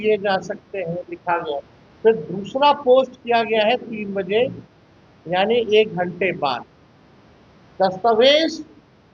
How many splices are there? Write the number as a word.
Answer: one